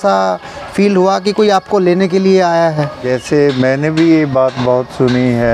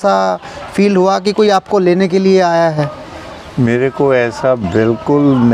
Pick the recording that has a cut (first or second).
first